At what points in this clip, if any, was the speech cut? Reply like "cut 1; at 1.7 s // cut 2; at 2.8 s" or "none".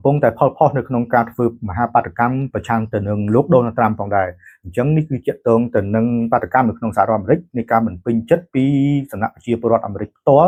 none

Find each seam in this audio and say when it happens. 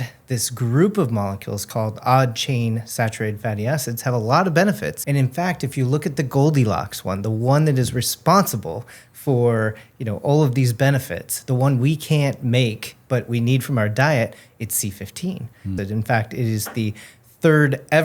cut 1; at 1.6 s // cut 2; at 5.0 s // cut 3; at 15.7 s

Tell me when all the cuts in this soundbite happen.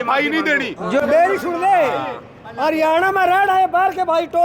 cut 1; at 1.0 s

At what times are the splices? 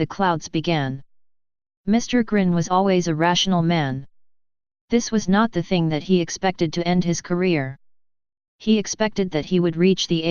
none

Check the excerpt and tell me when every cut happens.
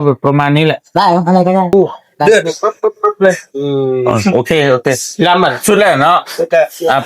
cut 1; at 1.7 s

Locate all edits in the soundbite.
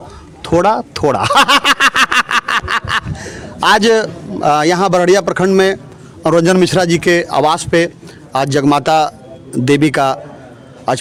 none

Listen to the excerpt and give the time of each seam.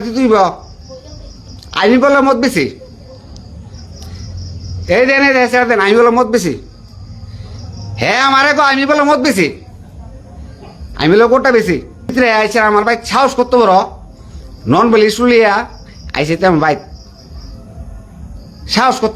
cut 1; at 12.1 s

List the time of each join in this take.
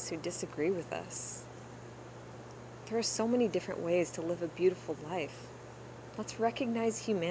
none

